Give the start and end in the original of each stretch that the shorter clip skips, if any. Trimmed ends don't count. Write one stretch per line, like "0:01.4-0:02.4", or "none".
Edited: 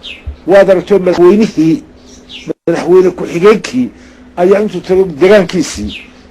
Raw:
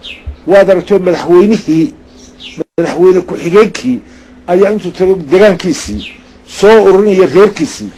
0:01.2-0:01.3